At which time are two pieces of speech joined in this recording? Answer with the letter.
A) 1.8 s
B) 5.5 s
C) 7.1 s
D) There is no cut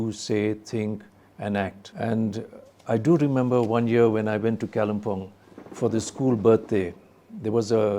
A